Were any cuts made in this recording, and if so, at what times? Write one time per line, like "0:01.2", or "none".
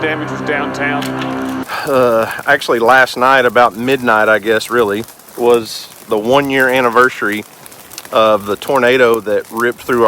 0:01.6